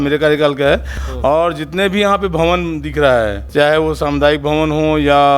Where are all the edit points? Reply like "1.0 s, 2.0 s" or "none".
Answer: 1.0 s, 3.4 s